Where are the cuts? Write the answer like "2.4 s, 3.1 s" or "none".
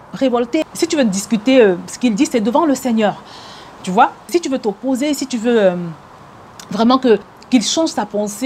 none